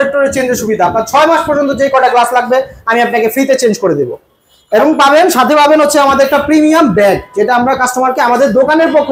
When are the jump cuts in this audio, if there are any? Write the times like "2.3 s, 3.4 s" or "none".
none